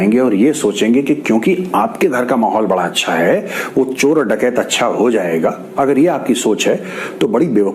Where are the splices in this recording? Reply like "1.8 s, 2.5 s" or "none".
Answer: none